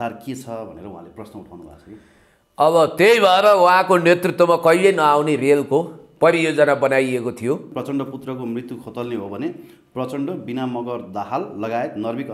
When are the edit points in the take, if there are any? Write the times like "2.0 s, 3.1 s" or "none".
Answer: 7.7 s